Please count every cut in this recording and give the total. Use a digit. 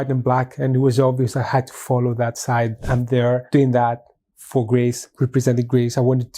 2